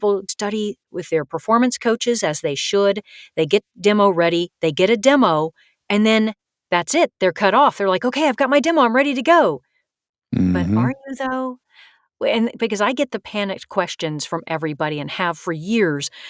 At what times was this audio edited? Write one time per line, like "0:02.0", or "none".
none